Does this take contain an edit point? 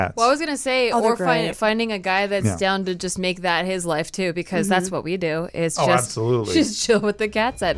no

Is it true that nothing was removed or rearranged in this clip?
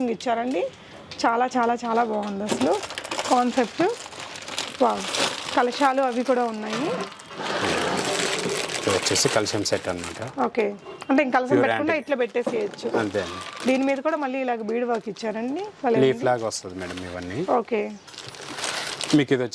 yes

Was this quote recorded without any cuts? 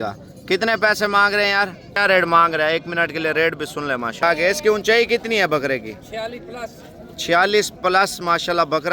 no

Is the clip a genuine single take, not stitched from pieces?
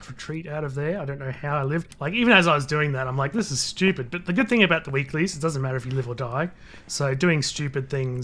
no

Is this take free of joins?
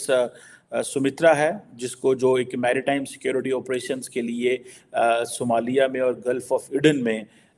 yes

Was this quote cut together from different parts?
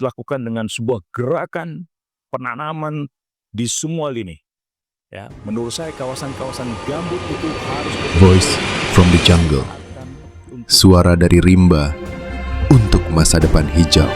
yes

